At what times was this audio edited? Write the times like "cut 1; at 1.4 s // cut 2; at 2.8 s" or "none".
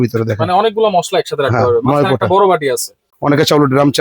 cut 1; at 3.0 s